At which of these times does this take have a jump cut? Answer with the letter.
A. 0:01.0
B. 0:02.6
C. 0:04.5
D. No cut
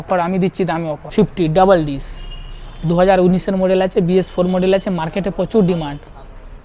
A